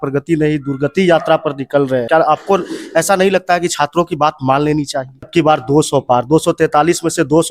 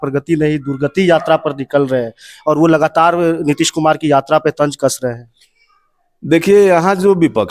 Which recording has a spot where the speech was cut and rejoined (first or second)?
first